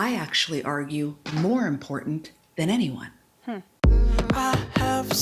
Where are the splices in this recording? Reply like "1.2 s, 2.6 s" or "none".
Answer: 3.7 s